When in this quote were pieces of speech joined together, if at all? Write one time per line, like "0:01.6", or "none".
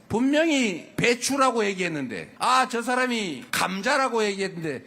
0:00.9
0:02.2
0:03.4